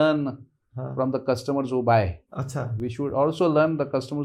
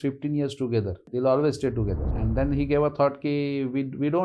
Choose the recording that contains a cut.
second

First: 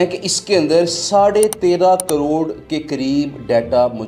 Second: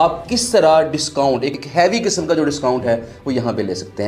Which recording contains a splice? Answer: second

